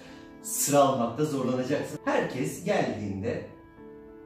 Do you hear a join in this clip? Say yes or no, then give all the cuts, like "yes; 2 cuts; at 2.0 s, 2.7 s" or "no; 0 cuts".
yes; 1 cut; at 1.9 s